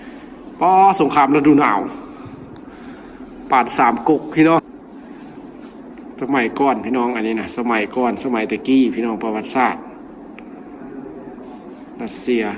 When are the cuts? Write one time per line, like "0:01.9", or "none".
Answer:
0:04.7